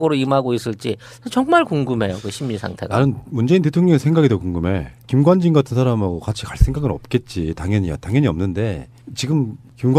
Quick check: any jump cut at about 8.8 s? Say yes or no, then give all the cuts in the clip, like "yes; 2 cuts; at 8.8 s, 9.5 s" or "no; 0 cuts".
yes; 1 cut; at 8.8 s